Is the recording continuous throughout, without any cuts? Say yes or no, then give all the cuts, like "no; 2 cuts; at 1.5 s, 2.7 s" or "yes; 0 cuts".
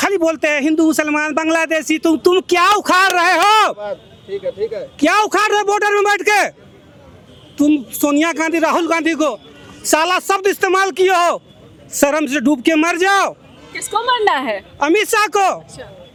yes; 0 cuts